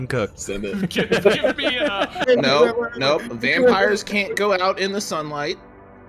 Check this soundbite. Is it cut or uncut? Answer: cut